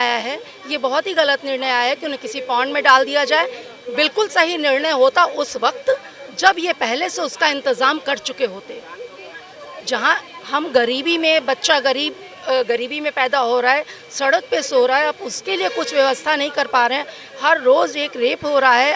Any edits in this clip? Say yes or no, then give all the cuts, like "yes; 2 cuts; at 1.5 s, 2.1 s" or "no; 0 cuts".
no; 0 cuts